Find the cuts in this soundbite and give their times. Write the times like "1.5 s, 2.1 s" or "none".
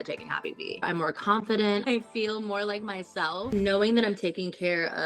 0.8 s, 1.9 s, 3.5 s